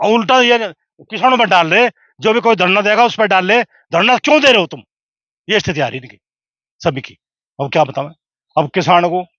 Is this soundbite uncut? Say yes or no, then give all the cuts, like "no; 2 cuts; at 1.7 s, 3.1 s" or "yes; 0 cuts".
yes; 0 cuts